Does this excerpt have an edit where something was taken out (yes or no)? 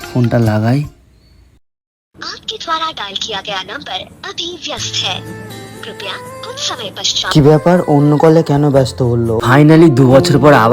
yes